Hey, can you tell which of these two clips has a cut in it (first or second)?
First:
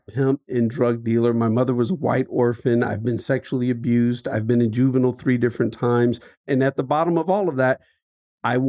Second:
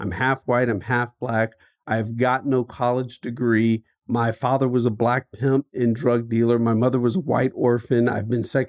first